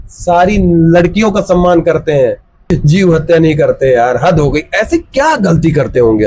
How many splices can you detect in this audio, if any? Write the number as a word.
one